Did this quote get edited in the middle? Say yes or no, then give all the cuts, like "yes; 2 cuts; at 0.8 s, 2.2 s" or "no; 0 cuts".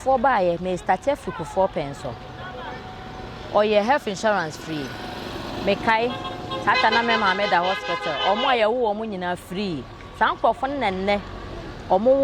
no; 0 cuts